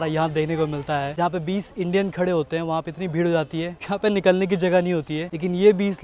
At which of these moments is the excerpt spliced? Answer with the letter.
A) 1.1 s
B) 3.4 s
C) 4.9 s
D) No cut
A